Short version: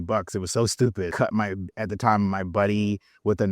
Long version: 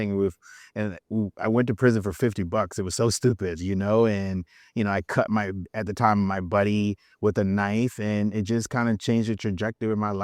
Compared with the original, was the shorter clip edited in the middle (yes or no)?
yes